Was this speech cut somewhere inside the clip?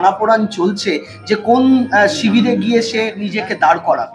yes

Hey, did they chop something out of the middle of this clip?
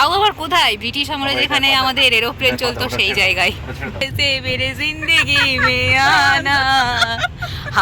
yes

